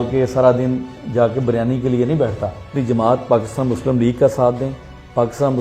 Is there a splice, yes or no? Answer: yes